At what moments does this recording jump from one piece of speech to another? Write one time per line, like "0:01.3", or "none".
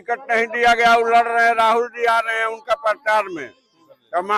none